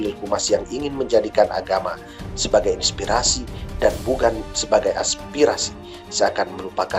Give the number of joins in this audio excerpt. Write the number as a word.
zero